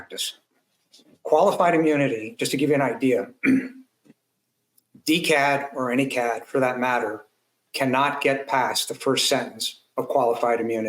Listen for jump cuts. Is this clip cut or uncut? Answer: uncut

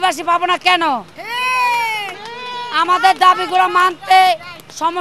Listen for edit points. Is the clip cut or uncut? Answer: uncut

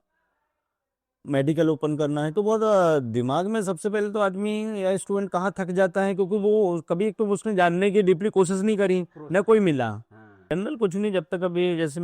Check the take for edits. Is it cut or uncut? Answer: cut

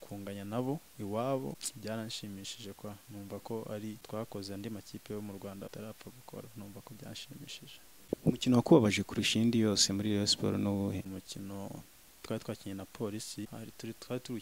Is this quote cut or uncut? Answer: cut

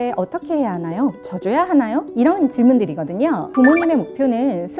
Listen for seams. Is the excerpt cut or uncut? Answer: cut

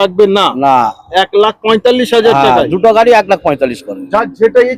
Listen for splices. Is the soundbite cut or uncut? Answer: uncut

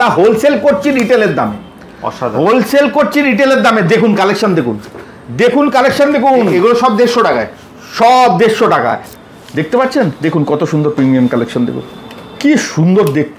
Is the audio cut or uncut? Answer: cut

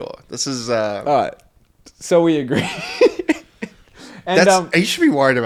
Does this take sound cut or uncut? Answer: uncut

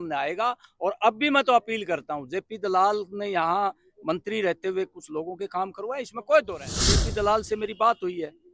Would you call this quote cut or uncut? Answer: cut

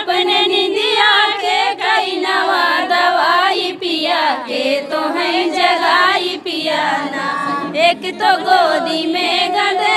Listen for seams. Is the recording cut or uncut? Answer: uncut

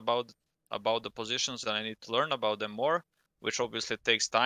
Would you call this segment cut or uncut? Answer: uncut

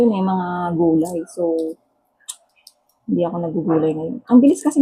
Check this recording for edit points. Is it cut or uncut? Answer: uncut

